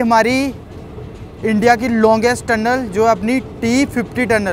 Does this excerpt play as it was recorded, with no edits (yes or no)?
yes